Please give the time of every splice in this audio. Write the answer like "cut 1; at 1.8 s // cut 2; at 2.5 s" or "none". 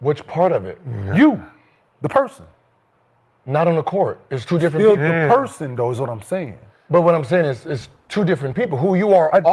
none